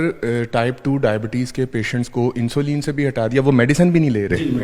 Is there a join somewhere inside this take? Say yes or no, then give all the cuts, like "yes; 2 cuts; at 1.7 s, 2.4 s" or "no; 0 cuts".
no; 0 cuts